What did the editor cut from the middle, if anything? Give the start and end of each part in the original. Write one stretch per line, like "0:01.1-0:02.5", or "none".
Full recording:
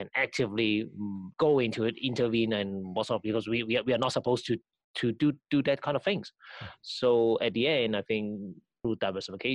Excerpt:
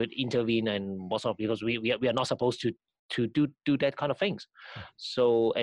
none